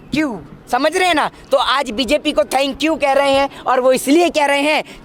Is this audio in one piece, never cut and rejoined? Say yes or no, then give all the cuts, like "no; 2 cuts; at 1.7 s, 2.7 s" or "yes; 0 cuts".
yes; 0 cuts